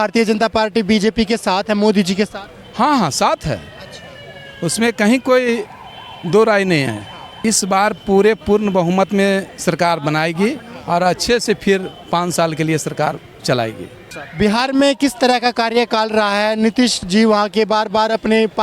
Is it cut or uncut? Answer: cut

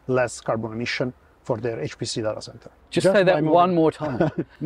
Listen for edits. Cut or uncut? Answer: uncut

